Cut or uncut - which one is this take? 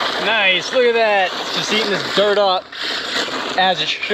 uncut